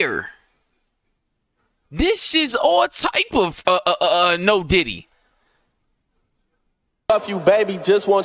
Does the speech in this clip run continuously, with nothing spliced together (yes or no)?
no